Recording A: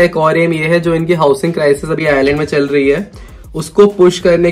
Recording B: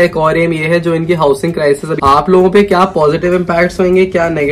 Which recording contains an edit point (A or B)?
B